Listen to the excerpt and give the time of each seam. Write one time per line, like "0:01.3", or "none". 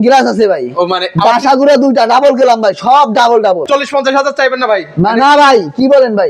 0:03.6

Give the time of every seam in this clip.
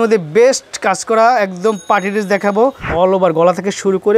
0:02.9

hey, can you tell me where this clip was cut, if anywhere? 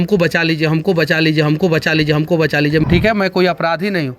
0:02.8

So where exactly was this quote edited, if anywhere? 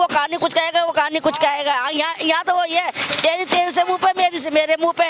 none

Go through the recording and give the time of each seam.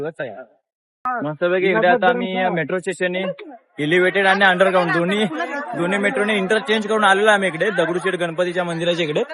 0:01.1

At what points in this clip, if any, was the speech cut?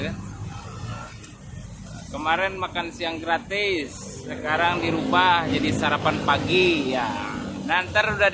none

